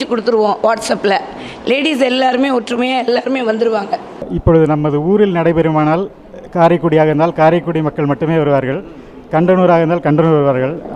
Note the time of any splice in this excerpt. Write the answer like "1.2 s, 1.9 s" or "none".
4.2 s